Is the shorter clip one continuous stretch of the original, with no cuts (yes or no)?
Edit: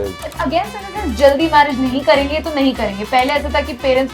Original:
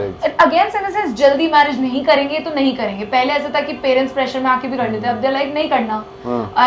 yes